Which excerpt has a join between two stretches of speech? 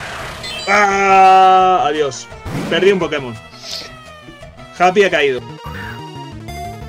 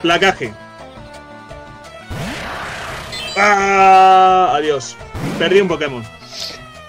first; 1 cut; at 5.4 s

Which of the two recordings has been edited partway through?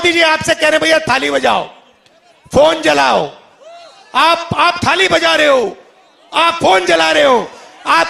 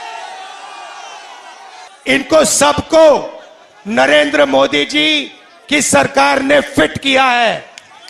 second; 1 cut; at 1.9 s

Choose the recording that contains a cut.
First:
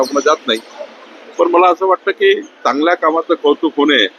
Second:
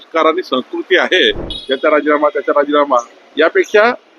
second; 1 cut; at 1.5 s

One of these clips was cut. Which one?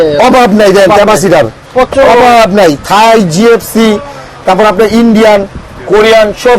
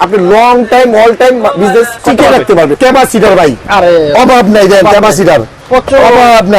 second; 2 cuts; at 2.0 s, 2.8 s

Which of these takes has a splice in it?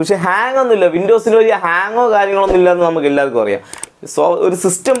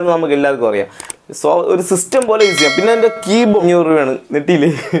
second; 1 cut; at 3.6 s

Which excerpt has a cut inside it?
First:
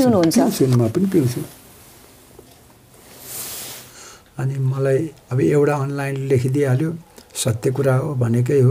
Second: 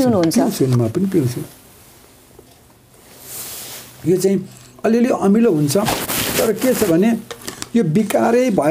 first; 1 cut; at 3.9 s

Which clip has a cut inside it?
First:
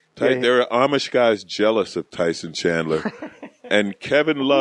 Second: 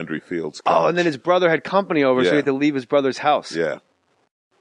second; 1 cut; at 1.0 s

